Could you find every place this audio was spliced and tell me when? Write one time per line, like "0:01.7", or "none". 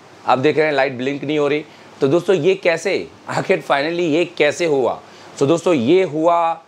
none